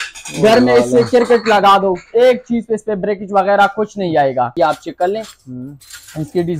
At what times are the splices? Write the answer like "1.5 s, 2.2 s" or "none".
4.5 s